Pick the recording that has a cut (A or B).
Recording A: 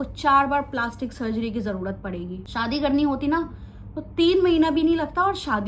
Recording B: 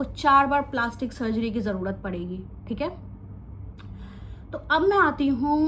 A